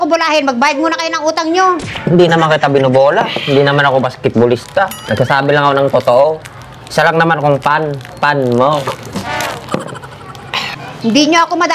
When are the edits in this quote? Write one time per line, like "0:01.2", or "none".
0:01.9
0:10.7